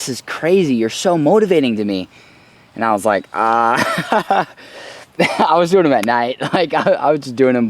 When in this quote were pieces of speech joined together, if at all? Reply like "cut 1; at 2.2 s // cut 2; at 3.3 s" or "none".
none